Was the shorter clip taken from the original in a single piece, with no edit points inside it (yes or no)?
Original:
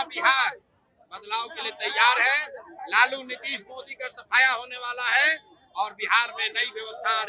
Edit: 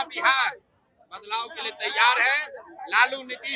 yes